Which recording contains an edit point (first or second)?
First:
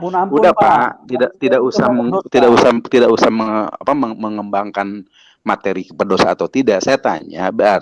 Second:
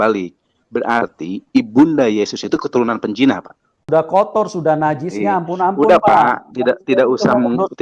second